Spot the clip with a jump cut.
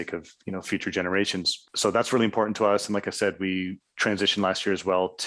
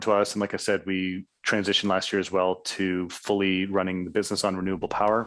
first; 1 cut; at 1.6 s

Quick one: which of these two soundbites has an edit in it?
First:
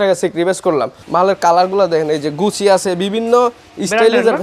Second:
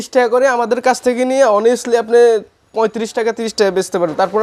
first; 1 cut; at 1.0 s

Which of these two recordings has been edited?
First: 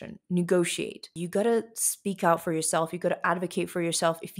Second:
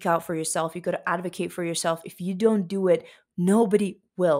first; 1 cut; at 1.1 s

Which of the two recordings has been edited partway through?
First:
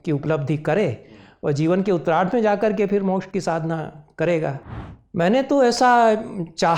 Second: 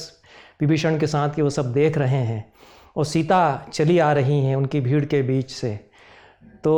first; 1 cut; at 4.5 s

